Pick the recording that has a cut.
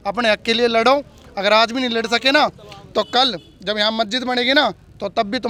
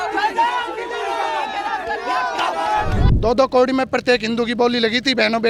second; 1 cut; at 3.0 s

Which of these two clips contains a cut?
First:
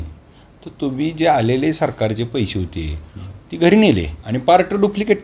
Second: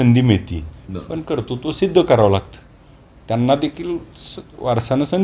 first; 1 cut; at 4.2 s

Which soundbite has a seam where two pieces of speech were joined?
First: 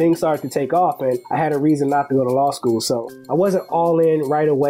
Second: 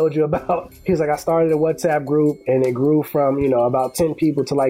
first; 2 cuts; at 1.2 s, 3.1 s

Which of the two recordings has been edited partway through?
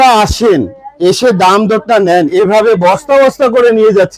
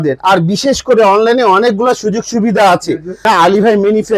second; 1 cut; at 3.2 s

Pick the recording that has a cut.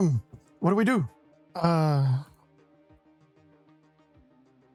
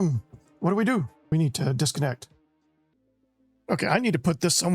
second; 1 cut; at 1.3 s

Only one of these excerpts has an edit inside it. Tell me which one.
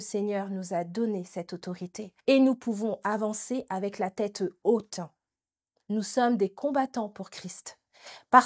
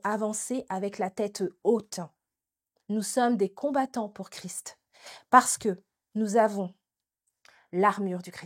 first; 1 cut; at 2.0 s

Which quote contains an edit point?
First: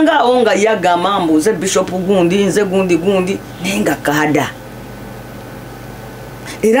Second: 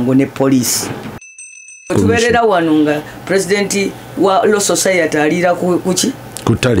second; 1 cut; at 1.6 s

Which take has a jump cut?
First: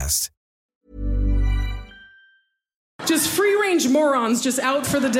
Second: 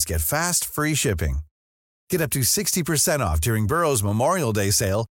first; 1 cut; at 2.9 s

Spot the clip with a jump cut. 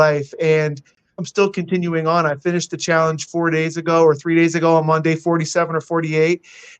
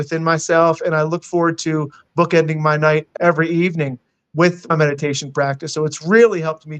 first; 1 cut; at 1.2 s

